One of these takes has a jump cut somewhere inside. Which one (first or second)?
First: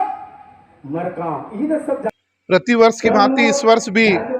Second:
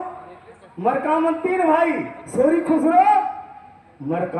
first